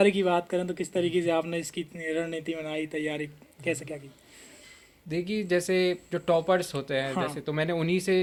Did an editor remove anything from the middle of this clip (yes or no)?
no